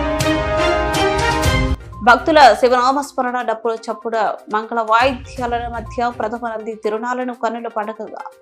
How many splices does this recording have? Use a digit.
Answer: 1